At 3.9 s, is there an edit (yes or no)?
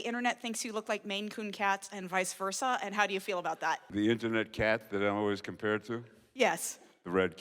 yes